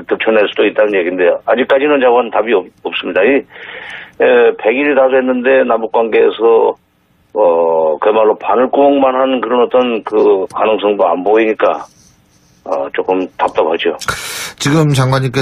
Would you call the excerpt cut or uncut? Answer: uncut